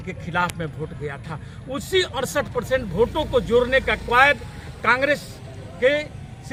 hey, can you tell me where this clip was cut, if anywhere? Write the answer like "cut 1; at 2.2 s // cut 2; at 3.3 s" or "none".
none